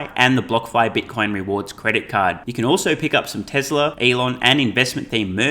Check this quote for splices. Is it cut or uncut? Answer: cut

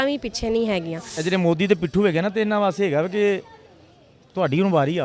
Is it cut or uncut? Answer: cut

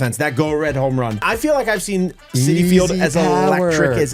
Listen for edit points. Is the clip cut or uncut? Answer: cut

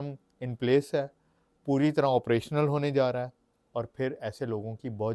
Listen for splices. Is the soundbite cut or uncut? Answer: uncut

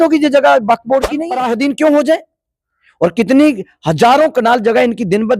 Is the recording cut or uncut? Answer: cut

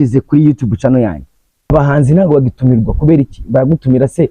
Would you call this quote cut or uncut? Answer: cut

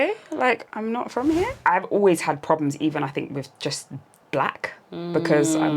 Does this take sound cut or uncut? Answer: cut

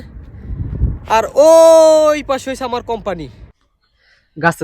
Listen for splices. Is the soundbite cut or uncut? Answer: cut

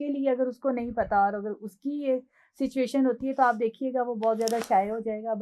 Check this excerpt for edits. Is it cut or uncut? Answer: uncut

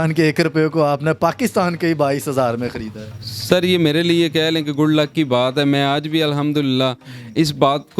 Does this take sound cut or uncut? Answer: uncut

